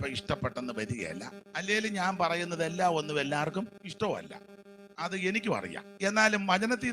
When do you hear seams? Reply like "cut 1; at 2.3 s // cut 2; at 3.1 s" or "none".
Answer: cut 1; at 1.4 s // cut 2; at 3.8 s // cut 3; at 5.8 s

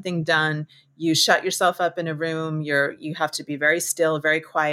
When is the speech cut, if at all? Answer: none

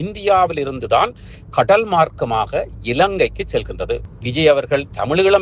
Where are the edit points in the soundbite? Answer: cut 1; at 4.2 s

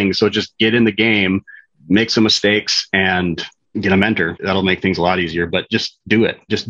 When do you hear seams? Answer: cut 1; at 3.7 s

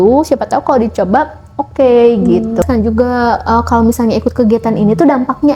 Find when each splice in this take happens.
cut 1; at 2.6 s

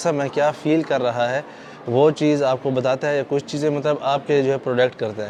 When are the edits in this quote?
none

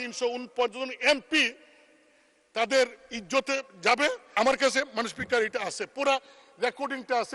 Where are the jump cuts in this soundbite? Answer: cut 1; at 4.3 s

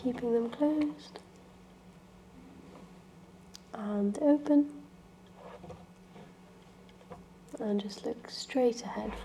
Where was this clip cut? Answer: none

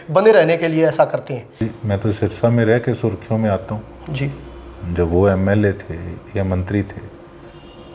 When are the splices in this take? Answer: cut 1; at 1.6 s

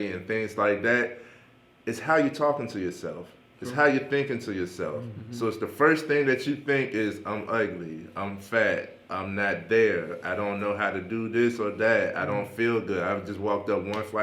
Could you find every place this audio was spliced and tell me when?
none

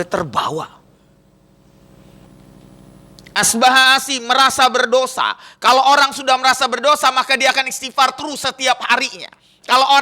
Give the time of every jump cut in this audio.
cut 1; at 2.3 s

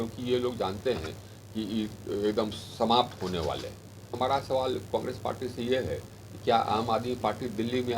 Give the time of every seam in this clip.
cut 1; at 4.1 s

